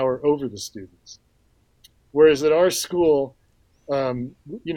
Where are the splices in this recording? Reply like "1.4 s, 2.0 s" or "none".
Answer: none

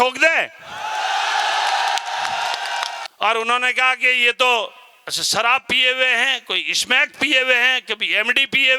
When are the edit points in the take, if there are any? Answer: 3.0 s

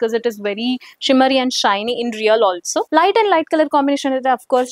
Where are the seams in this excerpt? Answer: 2.9 s

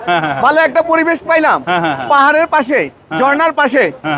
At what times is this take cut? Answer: none

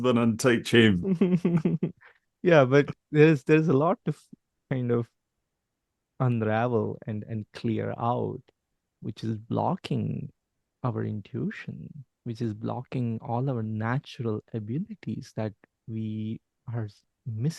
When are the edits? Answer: 16.5 s

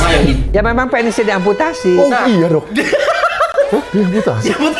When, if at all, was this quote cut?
none

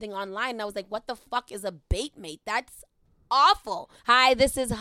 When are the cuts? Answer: 3.9 s

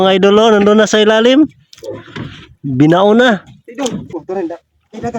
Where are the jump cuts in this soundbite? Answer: 4.1 s

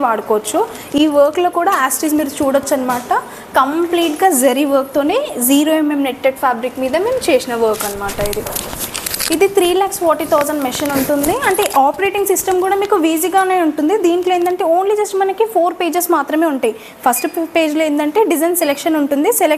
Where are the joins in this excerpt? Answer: none

